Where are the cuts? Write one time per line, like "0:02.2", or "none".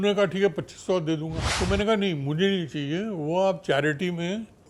0:01.4